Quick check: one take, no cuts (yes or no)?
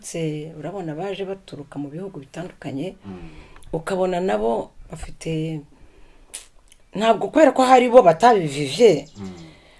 yes